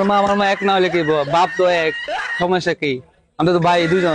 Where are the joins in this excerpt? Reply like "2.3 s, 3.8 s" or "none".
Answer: none